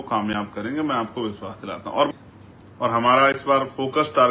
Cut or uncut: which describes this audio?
cut